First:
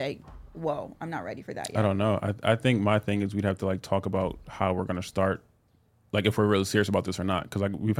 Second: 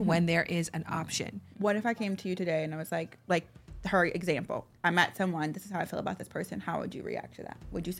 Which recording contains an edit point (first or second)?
second